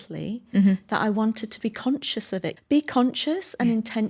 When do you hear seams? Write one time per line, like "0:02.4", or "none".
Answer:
0:02.5